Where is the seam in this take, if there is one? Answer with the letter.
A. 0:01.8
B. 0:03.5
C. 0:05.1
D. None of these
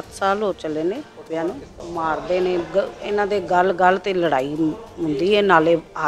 A